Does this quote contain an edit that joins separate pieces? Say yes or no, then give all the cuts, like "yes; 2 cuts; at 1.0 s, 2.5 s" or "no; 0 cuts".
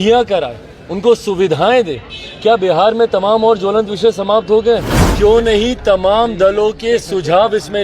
yes; 1 cut; at 5.0 s